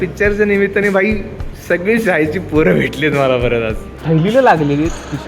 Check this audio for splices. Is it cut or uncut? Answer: cut